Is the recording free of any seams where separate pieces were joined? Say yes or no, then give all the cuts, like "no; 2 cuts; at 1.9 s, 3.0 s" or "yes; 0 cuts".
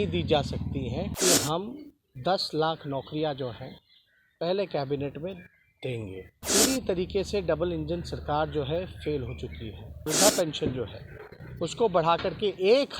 no; 3 cuts; at 1.1 s, 6.4 s, 10.1 s